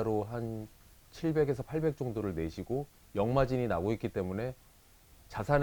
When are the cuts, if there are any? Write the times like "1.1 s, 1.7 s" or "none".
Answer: 3.0 s

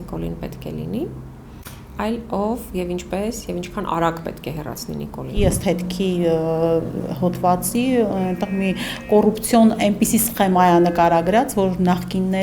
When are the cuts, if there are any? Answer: 5.4 s

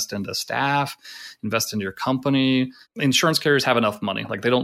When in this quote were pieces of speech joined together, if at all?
2.8 s

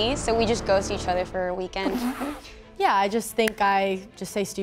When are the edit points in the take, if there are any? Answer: 2.7 s

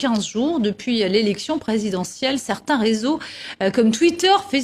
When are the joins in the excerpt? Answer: none

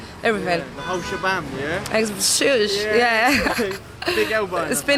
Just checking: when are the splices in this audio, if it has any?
none

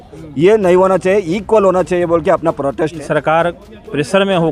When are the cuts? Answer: 2.9 s

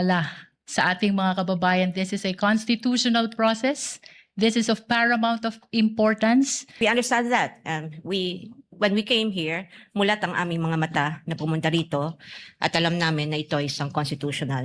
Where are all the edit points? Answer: 6.7 s

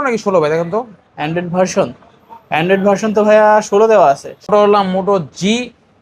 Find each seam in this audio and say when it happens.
4.5 s

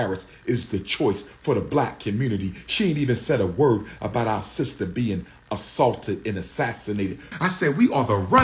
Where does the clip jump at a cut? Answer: 7.3 s

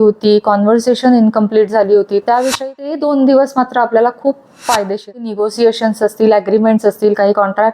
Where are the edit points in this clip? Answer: 2.6 s, 5.3 s

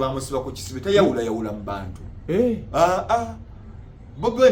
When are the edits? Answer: none

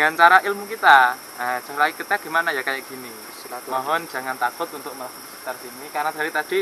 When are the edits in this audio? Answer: none

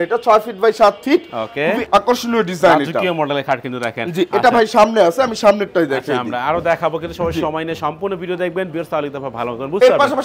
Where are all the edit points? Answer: none

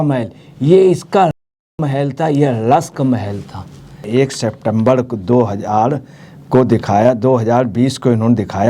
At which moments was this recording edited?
4.1 s

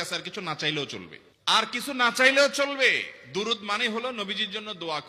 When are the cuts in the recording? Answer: none

